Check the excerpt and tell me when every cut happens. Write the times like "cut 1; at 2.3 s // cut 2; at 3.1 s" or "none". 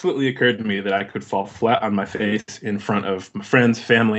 none